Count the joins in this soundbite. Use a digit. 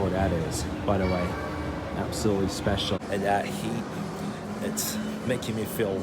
1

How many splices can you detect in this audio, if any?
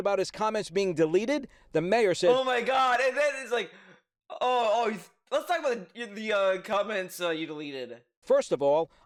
0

